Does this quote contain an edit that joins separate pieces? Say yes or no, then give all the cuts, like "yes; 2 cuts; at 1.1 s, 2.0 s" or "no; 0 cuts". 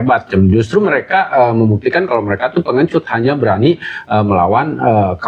no; 0 cuts